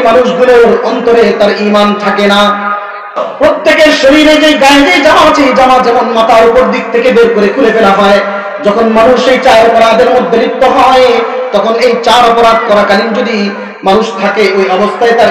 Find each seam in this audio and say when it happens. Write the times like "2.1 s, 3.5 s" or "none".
3.3 s